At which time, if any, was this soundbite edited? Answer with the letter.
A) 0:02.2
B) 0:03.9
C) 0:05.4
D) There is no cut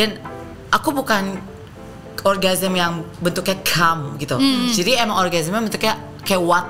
D